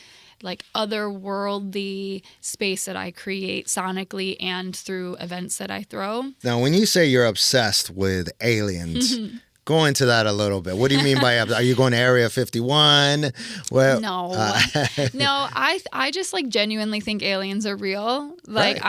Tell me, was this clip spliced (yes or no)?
yes